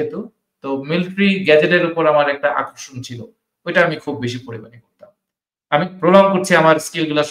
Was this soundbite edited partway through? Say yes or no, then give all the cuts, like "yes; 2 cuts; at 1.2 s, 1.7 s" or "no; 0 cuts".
no; 0 cuts